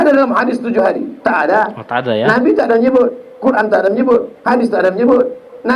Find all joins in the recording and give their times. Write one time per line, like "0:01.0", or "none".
none